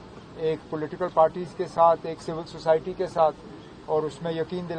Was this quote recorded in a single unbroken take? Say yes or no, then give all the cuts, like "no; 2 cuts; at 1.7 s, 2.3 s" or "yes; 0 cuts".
yes; 0 cuts